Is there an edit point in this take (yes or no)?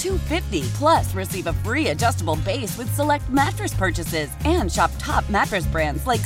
no